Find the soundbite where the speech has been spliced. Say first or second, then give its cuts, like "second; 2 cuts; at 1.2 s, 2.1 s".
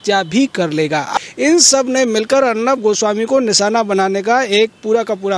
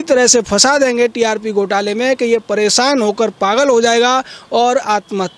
first; 1 cut; at 1.1 s